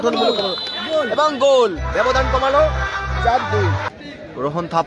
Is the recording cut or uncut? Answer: cut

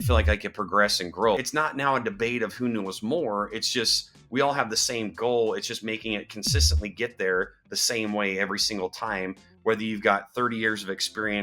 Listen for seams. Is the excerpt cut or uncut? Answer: cut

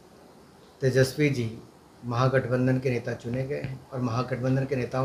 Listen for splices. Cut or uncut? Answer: uncut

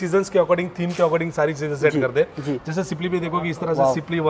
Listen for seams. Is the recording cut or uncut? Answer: uncut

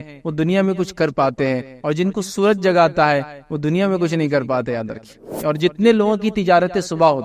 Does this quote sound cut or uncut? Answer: cut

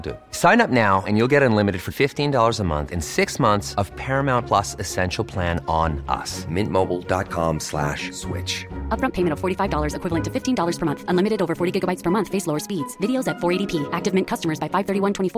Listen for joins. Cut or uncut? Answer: uncut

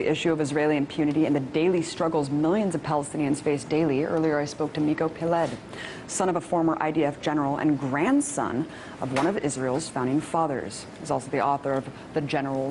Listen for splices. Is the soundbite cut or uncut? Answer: cut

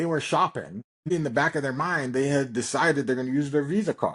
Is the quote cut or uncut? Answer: cut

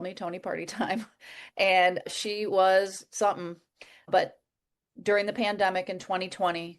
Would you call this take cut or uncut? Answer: cut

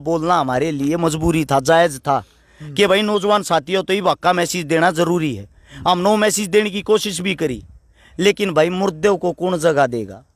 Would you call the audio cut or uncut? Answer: uncut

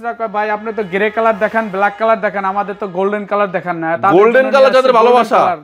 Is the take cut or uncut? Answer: uncut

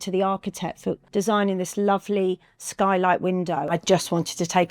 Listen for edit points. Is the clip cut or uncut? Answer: cut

